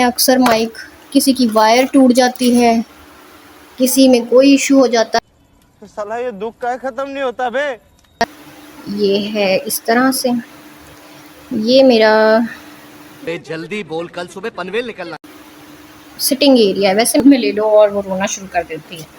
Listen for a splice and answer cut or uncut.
cut